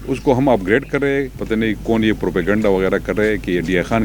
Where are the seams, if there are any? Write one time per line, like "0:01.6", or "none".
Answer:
0:01.4